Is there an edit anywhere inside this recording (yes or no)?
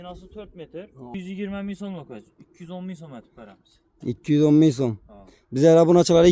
yes